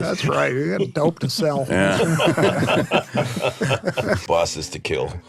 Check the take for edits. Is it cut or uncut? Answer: uncut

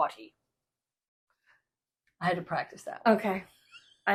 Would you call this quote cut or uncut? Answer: uncut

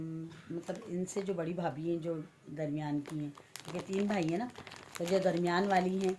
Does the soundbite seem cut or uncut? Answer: uncut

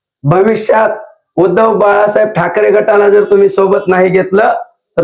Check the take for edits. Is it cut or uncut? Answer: uncut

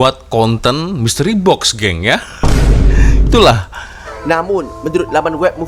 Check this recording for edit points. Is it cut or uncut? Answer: uncut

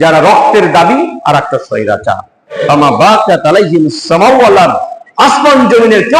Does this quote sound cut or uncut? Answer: cut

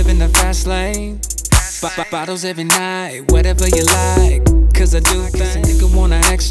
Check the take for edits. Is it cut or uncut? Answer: cut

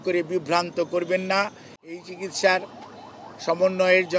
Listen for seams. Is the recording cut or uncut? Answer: cut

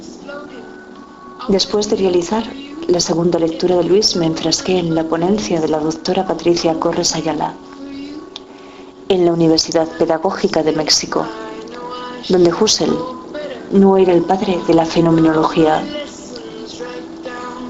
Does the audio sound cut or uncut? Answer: cut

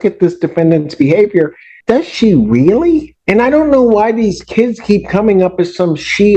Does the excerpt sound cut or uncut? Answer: cut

